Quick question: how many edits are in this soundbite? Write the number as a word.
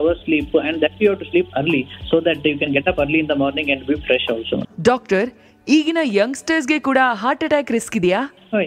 one